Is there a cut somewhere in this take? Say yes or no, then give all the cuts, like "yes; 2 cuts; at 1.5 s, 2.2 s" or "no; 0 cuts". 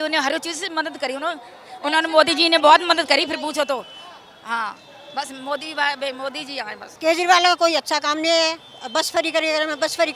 yes; 1 cut; at 6.8 s